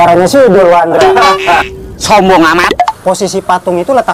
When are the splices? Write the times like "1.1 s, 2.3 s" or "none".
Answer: 3.0 s